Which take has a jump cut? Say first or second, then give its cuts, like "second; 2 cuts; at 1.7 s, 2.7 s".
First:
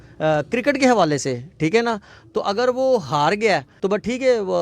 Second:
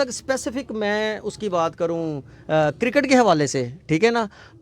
first; 1 cut; at 3.7 s